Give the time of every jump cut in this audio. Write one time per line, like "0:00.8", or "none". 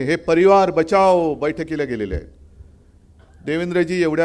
none